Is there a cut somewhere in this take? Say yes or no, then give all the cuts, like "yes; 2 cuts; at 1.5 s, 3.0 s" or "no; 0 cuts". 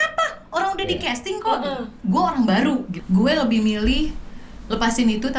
yes; 2 cuts; at 1.9 s, 2.9 s